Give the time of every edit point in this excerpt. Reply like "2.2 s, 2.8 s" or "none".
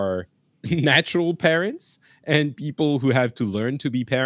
none